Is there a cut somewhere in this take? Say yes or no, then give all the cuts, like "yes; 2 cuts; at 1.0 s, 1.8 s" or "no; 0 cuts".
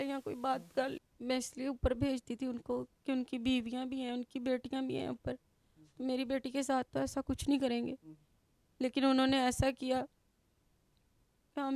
yes; 1 cut; at 1.1 s